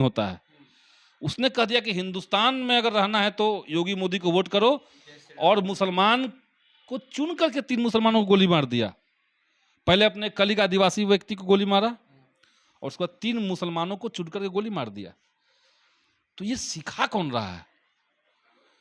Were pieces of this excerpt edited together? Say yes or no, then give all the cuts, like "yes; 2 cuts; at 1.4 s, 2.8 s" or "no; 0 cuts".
no; 0 cuts